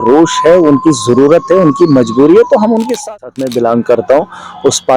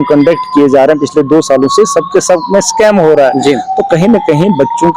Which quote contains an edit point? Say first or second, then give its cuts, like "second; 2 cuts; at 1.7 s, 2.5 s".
first; 1 cut; at 3.0 s